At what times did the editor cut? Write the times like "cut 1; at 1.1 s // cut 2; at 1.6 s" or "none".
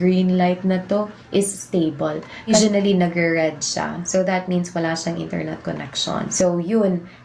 cut 1; at 2.5 s // cut 2; at 6.3 s